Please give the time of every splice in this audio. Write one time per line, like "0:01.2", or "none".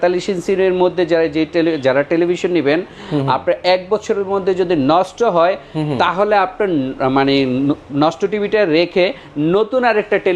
none